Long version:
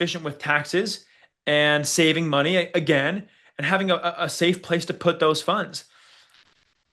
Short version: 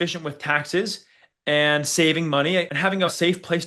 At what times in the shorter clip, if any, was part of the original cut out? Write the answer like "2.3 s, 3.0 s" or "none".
2.7 s